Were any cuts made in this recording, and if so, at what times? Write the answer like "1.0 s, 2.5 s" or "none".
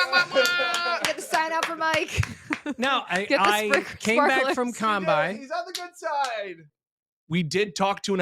6.6 s